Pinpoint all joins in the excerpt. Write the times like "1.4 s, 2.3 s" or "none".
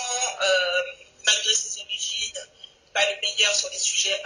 none